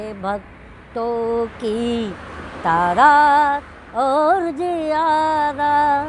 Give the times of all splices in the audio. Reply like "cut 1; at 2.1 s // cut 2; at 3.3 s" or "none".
none

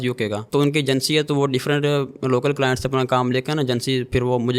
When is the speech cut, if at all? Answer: none

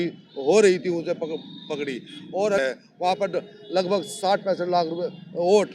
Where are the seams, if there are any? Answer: none

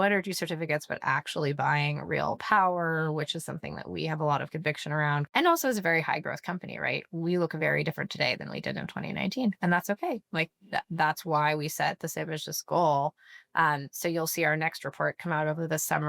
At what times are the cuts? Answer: cut 1; at 5.3 s

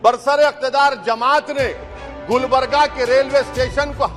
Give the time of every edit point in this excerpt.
none

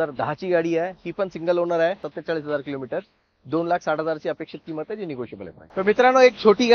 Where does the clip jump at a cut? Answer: cut 1; at 2.1 s // cut 2; at 5.7 s

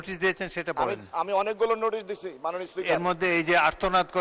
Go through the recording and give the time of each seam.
none

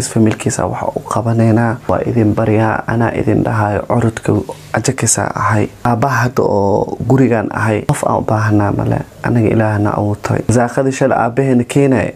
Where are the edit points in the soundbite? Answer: cut 1; at 1.8 s // cut 2; at 5.8 s // cut 3; at 7.9 s // cut 4; at 10.5 s

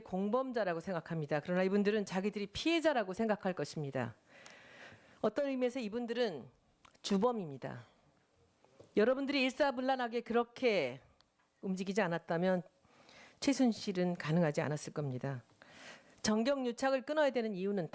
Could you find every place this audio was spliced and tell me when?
cut 1; at 8.1 s

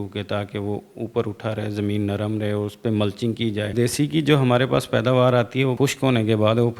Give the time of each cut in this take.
cut 1; at 3.7 s // cut 2; at 5.7 s

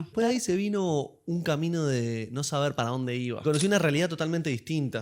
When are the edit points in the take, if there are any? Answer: cut 1; at 3.4 s

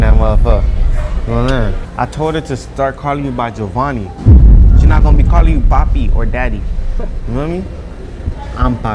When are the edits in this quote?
cut 1; at 1.8 s

